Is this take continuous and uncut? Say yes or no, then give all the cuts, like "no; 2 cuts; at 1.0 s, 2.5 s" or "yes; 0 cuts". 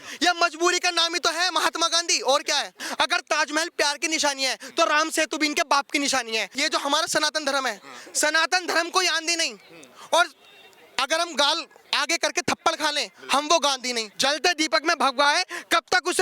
no; 3 cuts; at 2.8 s, 6.5 s, 14.1 s